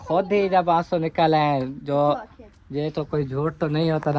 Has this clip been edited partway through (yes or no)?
no